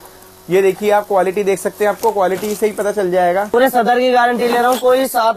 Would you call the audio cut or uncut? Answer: cut